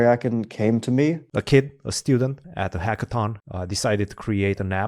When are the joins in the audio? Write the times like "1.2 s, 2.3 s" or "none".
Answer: 1.3 s, 2.4 s, 3.4 s